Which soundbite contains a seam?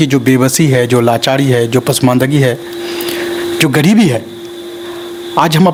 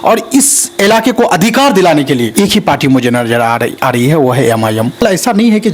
second; 2 cuts; at 2.3 s, 5.0 s

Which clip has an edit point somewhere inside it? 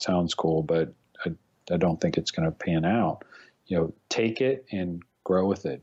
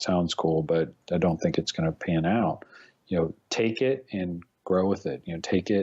second; 1 cut; at 1.0 s

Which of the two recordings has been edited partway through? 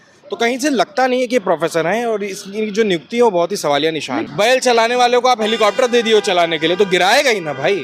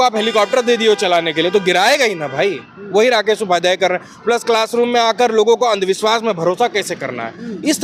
first; 1 cut; at 4.2 s

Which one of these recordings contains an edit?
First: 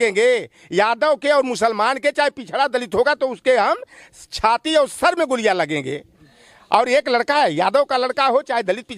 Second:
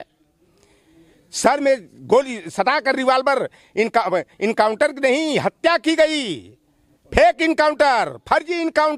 first; 1 cut; at 6.2 s

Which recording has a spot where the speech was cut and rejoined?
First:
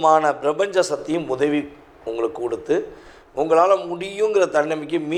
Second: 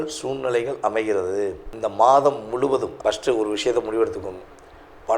second; 2 cuts; at 1.7 s, 2.9 s

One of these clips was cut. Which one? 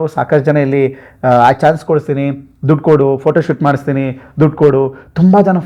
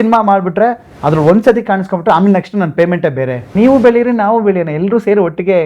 second; 1 cut; at 3.5 s

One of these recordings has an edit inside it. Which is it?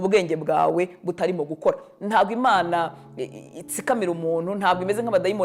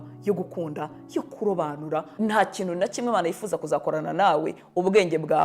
second; 1 cut; at 2.1 s

